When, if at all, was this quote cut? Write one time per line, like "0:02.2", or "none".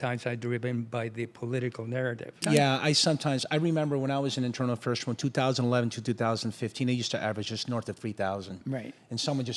0:02.4